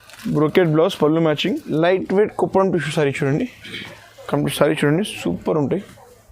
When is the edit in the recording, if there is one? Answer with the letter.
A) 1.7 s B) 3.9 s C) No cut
A